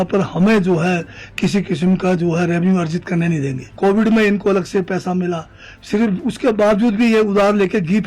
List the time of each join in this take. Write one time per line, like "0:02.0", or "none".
0:03.7